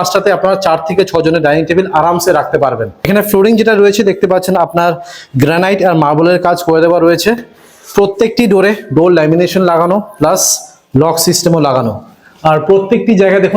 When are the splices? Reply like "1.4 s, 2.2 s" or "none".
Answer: 3.1 s